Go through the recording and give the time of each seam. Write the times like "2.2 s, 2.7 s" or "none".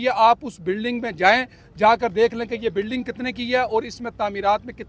none